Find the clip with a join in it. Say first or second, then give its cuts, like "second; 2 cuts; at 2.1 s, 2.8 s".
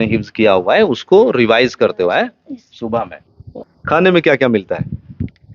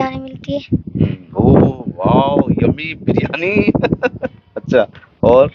first; 1 cut; at 3.6 s